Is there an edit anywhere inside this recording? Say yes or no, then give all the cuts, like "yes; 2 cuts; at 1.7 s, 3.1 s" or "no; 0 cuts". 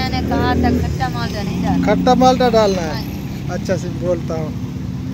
no; 0 cuts